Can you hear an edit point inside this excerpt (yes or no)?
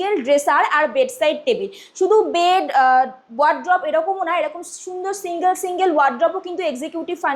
no